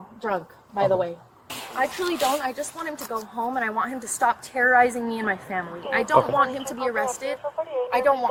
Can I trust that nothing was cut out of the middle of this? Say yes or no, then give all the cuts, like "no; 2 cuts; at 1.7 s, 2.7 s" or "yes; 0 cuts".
yes; 0 cuts